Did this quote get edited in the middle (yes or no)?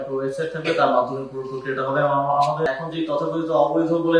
yes